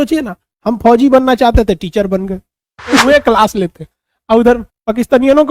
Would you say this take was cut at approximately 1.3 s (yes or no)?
no